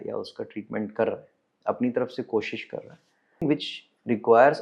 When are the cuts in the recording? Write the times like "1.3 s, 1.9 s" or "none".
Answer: 3.4 s